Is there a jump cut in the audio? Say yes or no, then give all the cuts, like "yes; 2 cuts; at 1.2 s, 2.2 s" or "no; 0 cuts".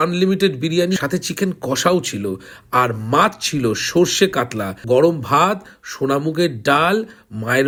no; 0 cuts